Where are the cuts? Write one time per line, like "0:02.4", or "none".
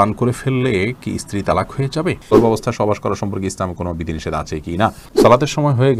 0:02.3
0:05.0